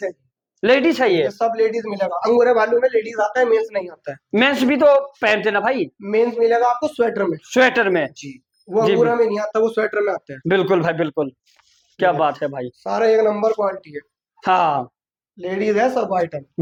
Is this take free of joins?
yes; 0 cuts

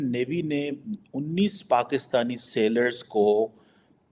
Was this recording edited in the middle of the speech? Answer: no; 0 cuts

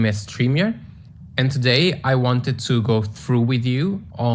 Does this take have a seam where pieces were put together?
no; 0 cuts

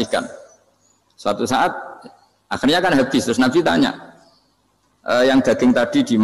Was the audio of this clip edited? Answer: no; 0 cuts

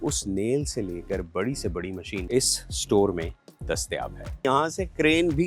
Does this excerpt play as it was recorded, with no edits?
no; 2 cuts; at 2.1 s, 4.4 s

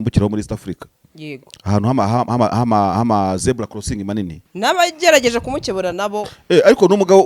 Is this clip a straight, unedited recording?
no; 1 cut; at 4.4 s

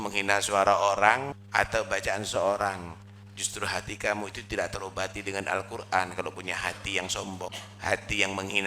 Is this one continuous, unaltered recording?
no; 2 cuts; at 1.4 s, 7.5 s

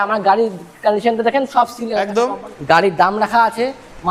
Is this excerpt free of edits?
no; 1 cut; at 2.1 s

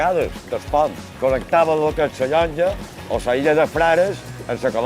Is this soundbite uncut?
no; 1 cut; at 2.9 s

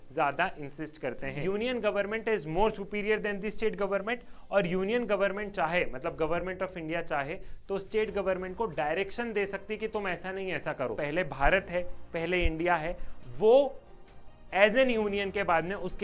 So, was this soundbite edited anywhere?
yes; 2 cuts; at 1.3 s, 10.9 s

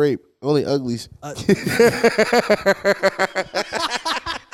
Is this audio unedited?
yes; 0 cuts

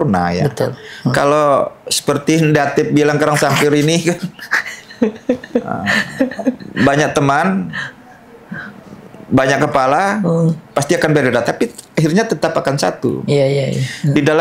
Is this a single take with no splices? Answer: yes; 0 cuts

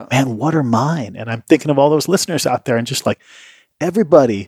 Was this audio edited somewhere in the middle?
no; 0 cuts

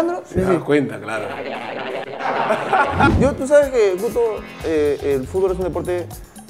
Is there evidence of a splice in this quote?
yes; 1 cut; at 3.1 s

